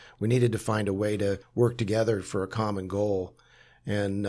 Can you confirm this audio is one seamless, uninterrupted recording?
no; 1 cut; at 1.4 s

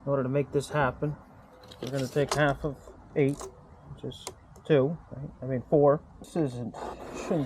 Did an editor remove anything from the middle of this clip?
yes; 1 cut; at 6.3 s

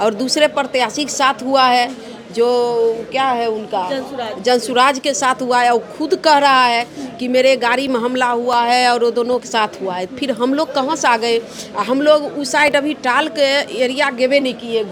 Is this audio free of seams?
yes; 0 cuts

